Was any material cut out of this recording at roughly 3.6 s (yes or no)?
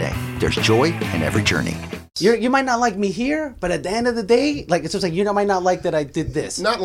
no